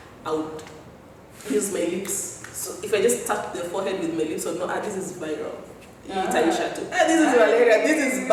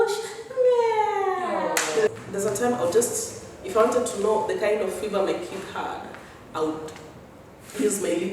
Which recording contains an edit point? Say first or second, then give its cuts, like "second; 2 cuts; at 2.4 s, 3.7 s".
second; 1 cut; at 2.1 s